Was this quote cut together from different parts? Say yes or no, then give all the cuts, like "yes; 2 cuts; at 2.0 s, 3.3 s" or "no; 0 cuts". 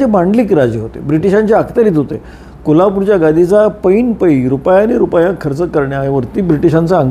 no; 0 cuts